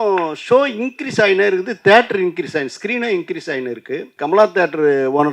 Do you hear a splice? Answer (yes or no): yes